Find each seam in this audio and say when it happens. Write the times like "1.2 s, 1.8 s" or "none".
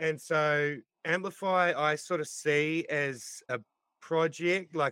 none